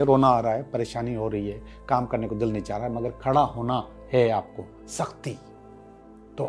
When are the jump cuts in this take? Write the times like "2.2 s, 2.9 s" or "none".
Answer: none

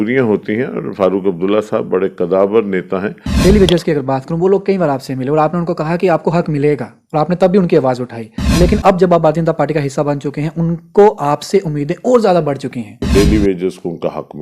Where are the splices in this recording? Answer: 3.2 s, 8.4 s, 13.0 s

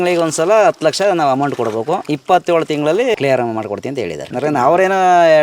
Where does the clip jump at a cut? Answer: 2.1 s, 3.1 s, 4.3 s

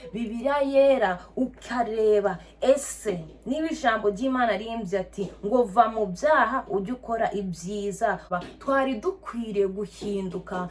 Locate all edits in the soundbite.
8.3 s

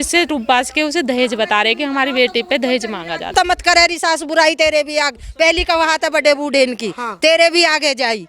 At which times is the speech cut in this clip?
3.3 s

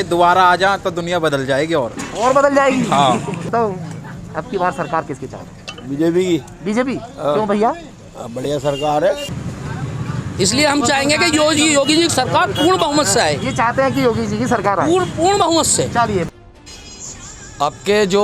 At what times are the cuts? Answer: 3.5 s, 9.3 s, 16.3 s

